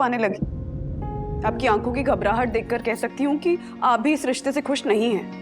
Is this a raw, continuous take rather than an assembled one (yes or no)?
no